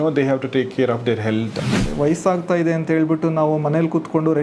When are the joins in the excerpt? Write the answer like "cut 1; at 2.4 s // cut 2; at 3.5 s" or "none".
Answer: cut 1; at 1.7 s